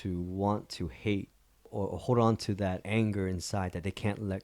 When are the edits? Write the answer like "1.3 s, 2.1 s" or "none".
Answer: 1.7 s, 2.8 s